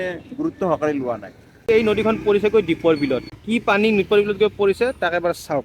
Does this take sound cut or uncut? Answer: cut